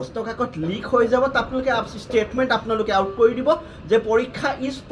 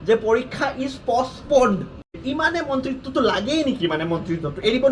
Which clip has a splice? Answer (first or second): second